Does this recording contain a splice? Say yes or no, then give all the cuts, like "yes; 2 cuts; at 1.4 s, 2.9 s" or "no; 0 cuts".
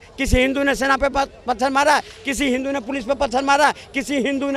no; 0 cuts